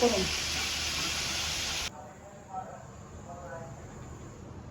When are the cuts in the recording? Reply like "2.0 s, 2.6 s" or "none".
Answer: 1.9 s

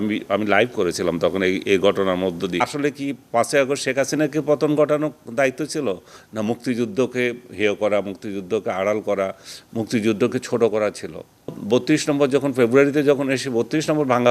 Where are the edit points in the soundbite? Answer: 2.6 s, 11.6 s

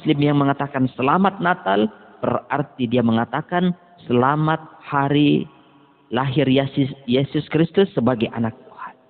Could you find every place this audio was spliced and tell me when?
none

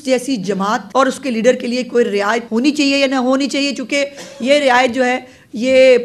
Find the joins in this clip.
0.8 s, 2.4 s

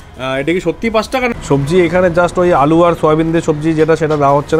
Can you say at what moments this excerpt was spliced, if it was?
1.3 s

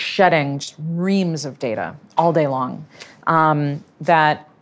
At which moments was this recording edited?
none

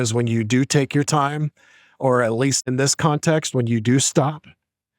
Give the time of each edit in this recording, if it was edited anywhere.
2.6 s

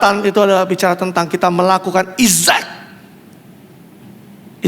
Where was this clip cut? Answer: none

